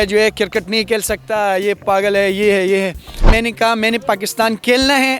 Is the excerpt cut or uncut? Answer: cut